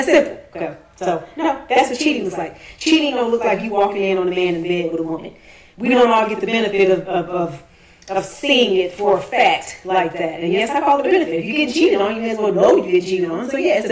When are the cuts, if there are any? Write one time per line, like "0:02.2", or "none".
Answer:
none

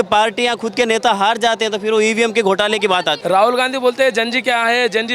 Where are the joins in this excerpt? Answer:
0:03.2

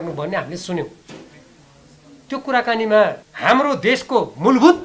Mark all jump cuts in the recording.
0:03.3

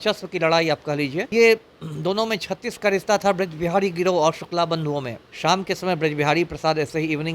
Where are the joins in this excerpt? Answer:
0:01.3
0:05.2

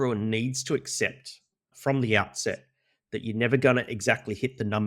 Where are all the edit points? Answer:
0:01.7

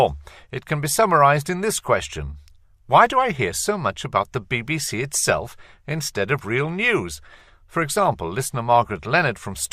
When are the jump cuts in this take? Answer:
0:07.1

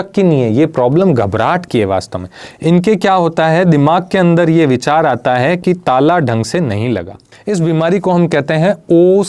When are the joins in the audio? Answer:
0:07.3

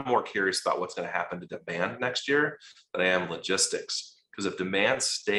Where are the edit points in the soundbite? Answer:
none

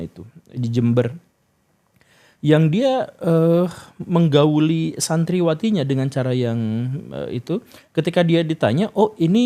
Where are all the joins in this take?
none

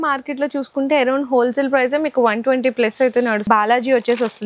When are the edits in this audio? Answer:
0:03.4

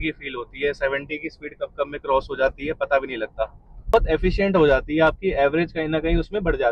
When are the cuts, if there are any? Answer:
0:03.9

